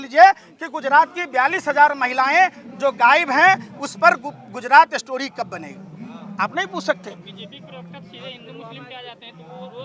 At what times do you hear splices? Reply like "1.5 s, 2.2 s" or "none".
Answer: none